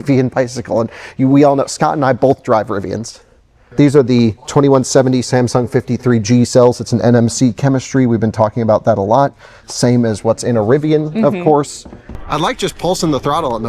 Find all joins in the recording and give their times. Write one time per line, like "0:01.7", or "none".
0:03.6
0:12.3